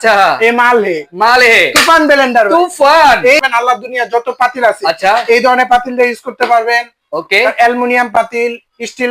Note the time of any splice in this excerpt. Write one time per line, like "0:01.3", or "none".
0:03.4